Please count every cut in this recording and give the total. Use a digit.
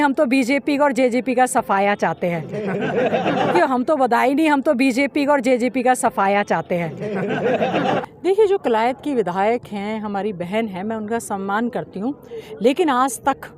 2